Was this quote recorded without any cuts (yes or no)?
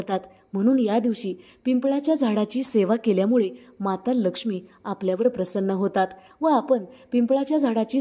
yes